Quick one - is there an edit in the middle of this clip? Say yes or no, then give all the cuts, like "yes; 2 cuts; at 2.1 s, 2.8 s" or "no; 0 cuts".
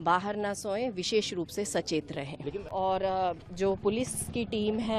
yes; 1 cut; at 2.7 s